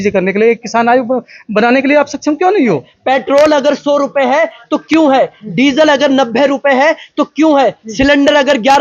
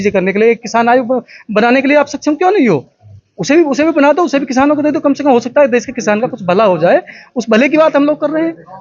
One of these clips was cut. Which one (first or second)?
first